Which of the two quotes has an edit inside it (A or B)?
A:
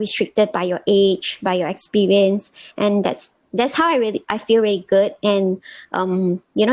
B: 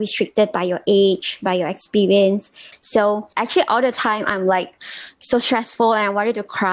B